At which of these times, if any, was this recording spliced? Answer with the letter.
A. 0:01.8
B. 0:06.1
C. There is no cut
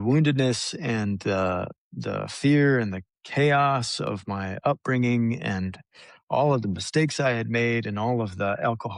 C